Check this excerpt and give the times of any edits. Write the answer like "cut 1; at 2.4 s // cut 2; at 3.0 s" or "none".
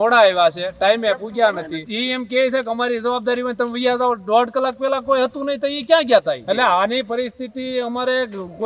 cut 1; at 1.9 s // cut 2; at 6.4 s